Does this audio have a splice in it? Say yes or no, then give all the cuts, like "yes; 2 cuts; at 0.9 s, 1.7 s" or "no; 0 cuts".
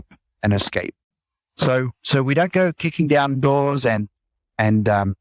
no; 0 cuts